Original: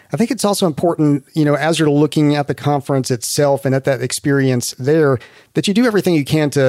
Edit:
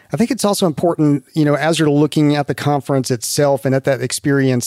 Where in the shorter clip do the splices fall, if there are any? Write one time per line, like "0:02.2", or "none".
none